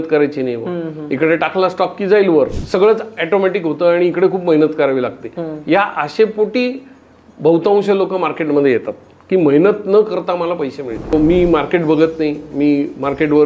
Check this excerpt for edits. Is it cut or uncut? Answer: cut